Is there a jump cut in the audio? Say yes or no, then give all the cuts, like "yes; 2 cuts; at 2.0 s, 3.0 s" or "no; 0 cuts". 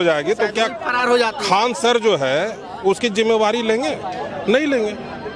no; 0 cuts